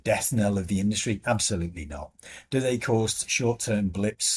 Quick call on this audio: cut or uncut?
uncut